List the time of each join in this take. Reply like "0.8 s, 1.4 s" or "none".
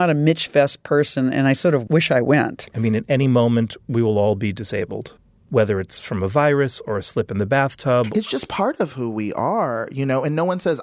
2.6 s, 8.1 s